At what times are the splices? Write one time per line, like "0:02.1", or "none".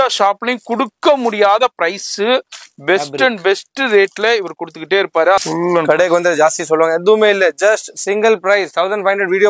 0:05.4

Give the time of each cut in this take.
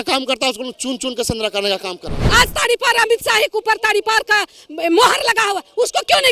0:02.2

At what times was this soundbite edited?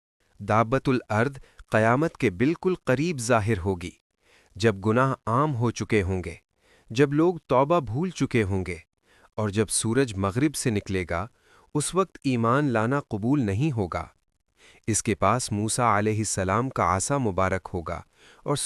none

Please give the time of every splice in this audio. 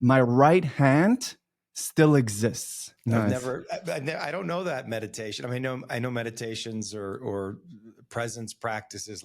0:03.3

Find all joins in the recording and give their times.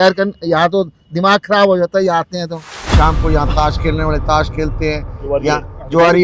0:02.7

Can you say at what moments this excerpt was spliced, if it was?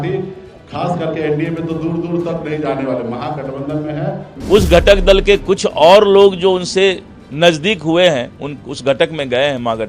0:04.3

